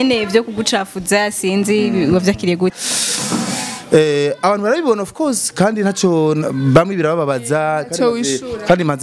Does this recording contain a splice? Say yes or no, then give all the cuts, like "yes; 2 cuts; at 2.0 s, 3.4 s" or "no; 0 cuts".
yes; 1 cut; at 2.8 s